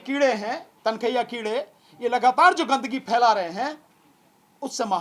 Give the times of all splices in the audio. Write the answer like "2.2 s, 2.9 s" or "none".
none